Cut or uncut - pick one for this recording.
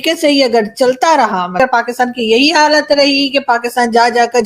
cut